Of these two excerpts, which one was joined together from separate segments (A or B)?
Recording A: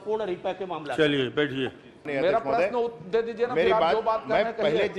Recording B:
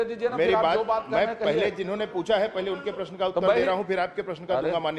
A